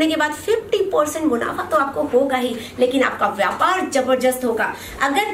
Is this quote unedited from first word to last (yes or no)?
yes